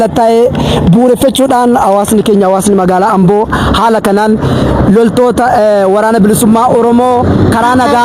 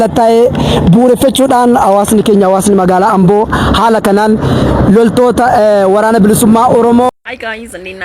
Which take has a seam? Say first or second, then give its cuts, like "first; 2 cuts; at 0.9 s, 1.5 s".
second; 1 cut; at 7.1 s